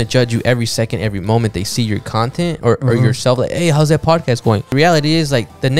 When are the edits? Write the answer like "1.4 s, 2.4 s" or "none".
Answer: 4.7 s